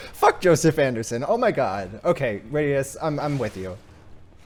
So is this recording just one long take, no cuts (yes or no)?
yes